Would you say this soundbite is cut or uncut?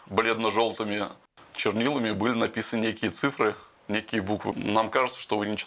cut